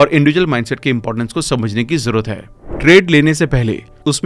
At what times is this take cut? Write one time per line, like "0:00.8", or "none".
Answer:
0:02.5